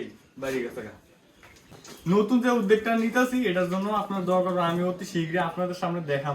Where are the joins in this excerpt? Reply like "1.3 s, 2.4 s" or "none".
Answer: 1.7 s